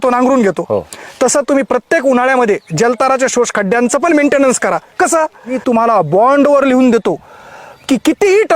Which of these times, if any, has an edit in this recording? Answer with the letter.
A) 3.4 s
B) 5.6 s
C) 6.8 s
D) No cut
B